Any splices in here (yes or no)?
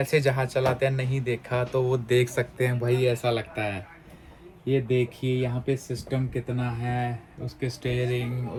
no